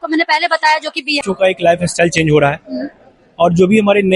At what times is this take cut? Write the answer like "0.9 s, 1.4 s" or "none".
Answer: 1.2 s